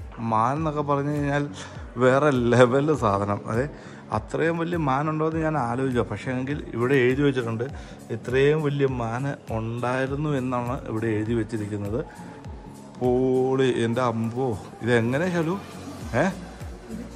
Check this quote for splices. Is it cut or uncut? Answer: uncut